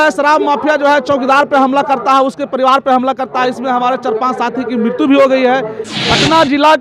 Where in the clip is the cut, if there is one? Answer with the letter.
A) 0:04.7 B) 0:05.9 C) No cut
B